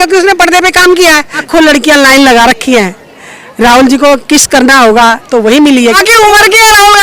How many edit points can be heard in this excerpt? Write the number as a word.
two